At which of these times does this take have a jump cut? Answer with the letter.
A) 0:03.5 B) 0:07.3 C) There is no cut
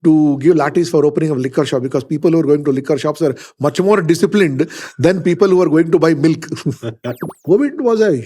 B